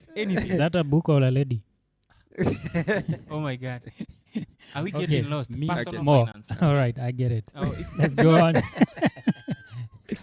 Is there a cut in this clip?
no; 0 cuts

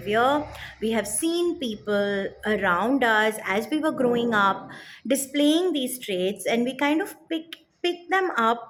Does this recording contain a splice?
no; 0 cuts

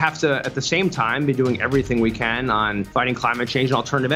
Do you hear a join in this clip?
yes; 1 cut; at 2.9 s

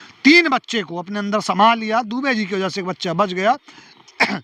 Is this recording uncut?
yes; 0 cuts

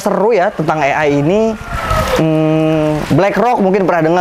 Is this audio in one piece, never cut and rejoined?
yes; 0 cuts

